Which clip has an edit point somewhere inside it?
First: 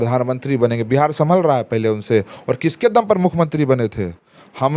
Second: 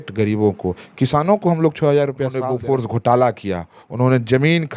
second; 1 cut; at 2.4 s

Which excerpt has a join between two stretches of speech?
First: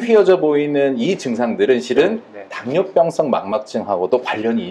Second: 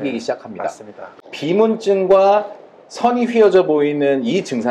second; 1 cut; at 1.1 s

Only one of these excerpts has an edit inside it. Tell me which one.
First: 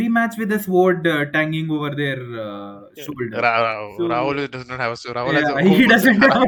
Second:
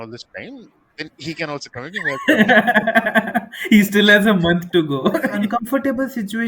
second; 1 cut; at 5.3 s

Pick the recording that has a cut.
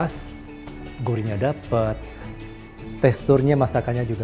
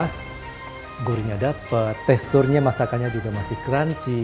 second; 1 cut; at 2.0 s

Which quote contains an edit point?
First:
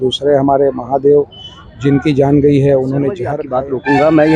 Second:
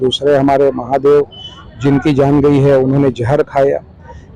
first; 1 cut; at 3.4 s

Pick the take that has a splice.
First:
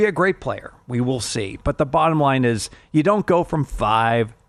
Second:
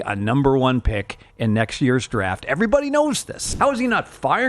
second; 1 cut; at 3.4 s

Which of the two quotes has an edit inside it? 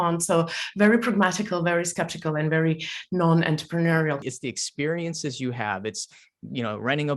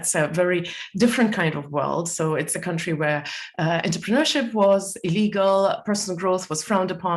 first; 1 cut; at 4.2 s

